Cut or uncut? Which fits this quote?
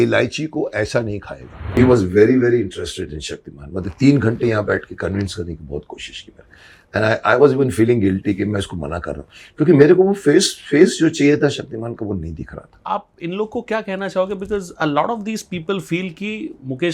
cut